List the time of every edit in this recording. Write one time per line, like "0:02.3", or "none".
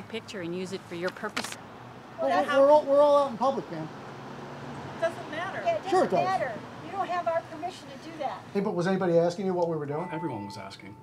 0:01.6
0:08.5